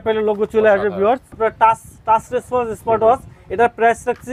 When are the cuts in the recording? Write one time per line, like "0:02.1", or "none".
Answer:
0:01.3

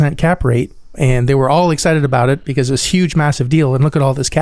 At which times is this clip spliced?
0:00.9

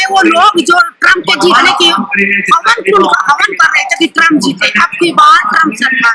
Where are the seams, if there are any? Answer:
none

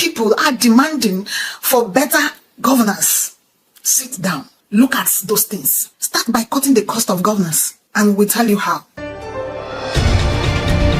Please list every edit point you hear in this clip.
0:08.9

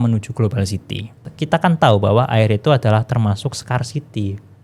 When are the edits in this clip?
0:01.3

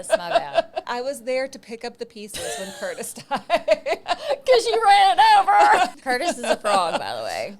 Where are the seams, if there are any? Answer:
0:00.9
0:04.0
0:05.9

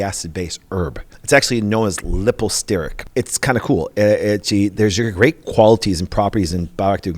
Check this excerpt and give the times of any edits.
0:01.1
0:03.0

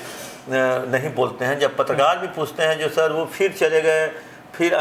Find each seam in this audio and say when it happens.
none

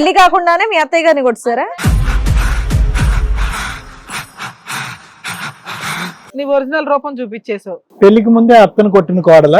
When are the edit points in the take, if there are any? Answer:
0:01.6
0:06.3
0:07.8

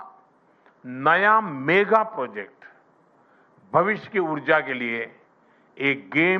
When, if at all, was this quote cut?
0:04.3

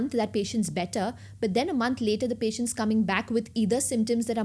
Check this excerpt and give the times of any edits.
none

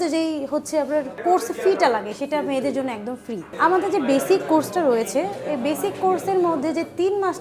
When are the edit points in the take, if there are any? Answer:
0:01.2
0:03.5

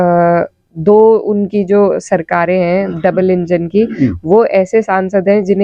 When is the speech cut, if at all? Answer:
none

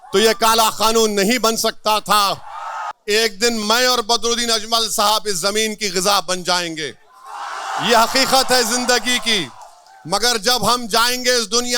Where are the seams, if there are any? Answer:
0:02.8

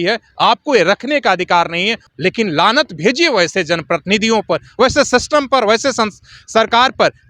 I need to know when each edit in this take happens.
0:02.0

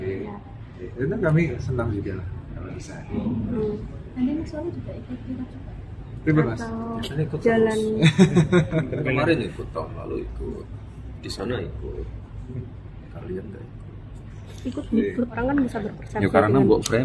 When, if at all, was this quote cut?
0:15.3

